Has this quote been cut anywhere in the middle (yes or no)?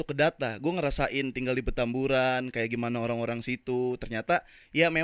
no